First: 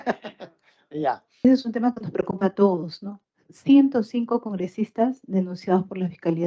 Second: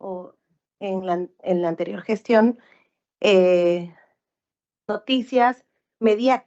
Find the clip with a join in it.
first; 1 cut; at 1.3 s

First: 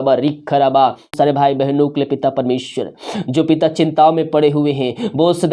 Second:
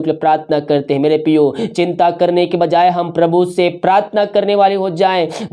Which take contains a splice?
first; 1 cut; at 1.1 s

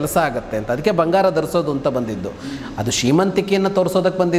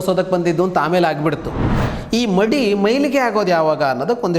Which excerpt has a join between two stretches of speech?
second; 1 cut; at 1.7 s

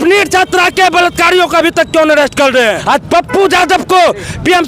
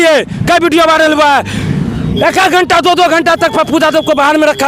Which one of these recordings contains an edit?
first; 1 cut; at 2.8 s

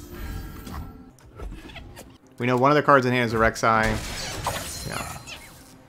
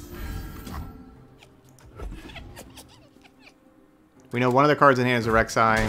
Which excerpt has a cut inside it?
first; 2 cuts; at 1.1 s, 2.2 s

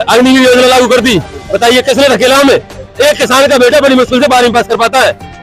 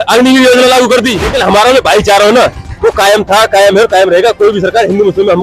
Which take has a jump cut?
second; 1 cut; at 1.2 s

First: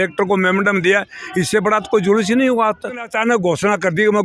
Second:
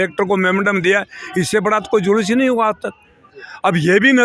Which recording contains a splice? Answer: first; 1 cut; at 3.1 s

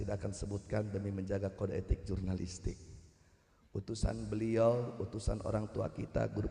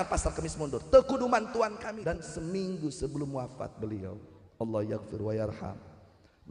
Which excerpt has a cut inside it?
second; 1 cut; at 1.8 s

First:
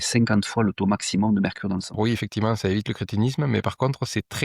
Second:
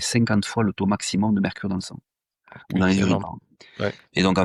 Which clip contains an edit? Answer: first; 1 cut; at 2.0 s

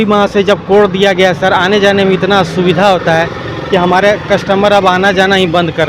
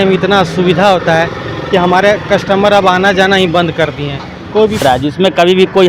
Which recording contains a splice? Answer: second; 1 cut; at 4.8 s

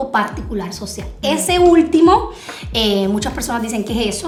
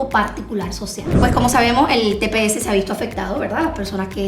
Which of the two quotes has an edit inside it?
second; 1 cut; at 1.0 s

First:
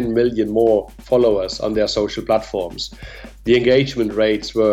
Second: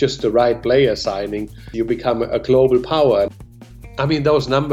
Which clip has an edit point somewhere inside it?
second; 2 cuts; at 1.6 s, 3.3 s

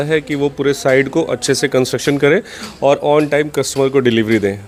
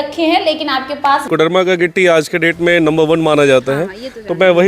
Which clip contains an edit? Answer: second; 1 cut; at 1.2 s

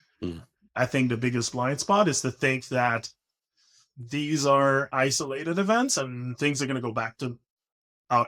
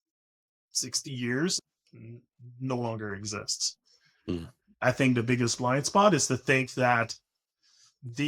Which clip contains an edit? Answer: second; 1 cut; at 1.6 s

